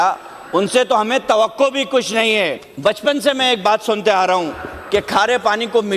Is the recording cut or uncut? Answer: cut